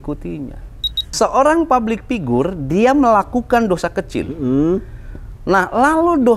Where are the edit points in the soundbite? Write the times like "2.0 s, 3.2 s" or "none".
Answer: 1.0 s